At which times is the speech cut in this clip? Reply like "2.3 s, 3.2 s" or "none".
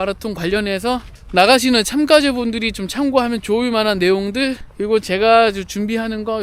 1.2 s, 4.7 s